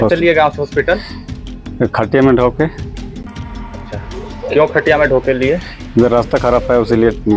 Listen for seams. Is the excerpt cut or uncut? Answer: uncut